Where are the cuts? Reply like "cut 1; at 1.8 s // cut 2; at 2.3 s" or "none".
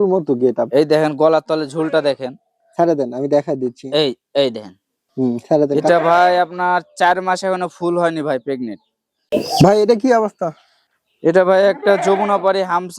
cut 1; at 5.9 s // cut 2; at 9.2 s

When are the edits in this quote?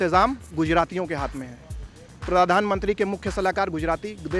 none

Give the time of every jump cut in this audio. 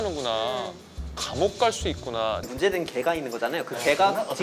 cut 1; at 2.5 s

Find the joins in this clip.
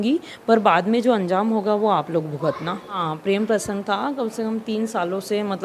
cut 1; at 3.0 s

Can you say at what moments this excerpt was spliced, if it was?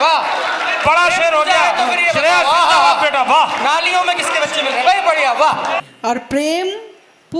cut 1; at 5.8 s

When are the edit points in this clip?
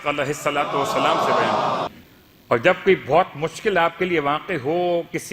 cut 1; at 1.9 s

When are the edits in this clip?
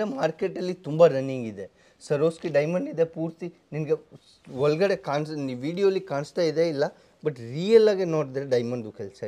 none

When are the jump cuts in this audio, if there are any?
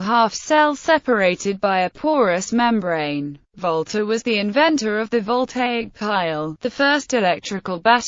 cut 1; at 1.7 s

